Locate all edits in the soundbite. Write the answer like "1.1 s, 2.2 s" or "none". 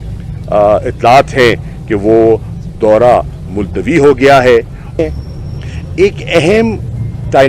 5.0 s